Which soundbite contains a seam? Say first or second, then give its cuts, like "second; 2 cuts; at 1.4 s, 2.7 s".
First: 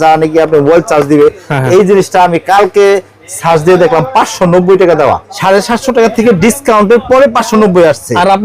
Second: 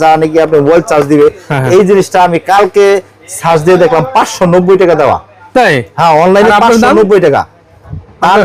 first; 1 cut; at 5.3 s